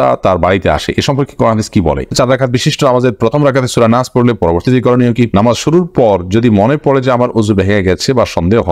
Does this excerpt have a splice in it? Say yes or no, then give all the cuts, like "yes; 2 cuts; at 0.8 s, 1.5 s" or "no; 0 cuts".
yes; 2 cuts; at 2.1 s, 5.3 s